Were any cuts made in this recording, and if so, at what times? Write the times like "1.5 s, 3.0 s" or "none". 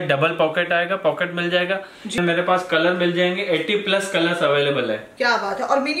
2.2 s